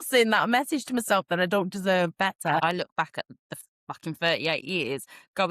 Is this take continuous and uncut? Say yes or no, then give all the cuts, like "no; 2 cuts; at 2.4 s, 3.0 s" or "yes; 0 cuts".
no; 1 cut; at 2.6 s